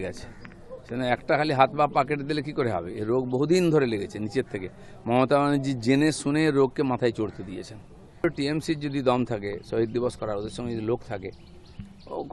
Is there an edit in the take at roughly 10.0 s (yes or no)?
no